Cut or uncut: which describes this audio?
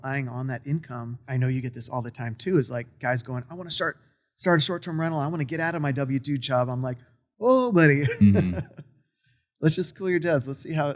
cut